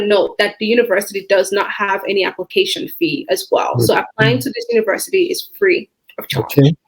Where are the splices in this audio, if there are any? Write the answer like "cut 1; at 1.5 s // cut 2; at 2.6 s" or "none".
none